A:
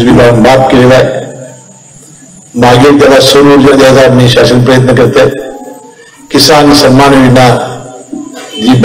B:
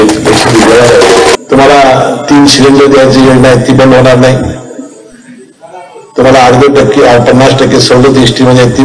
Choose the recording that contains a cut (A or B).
B